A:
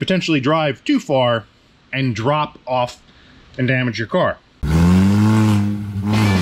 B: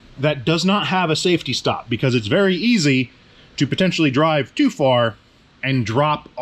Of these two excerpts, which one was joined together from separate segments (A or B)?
A